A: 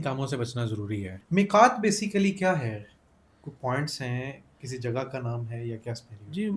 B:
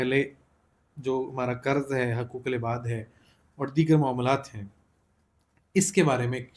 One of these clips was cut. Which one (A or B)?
A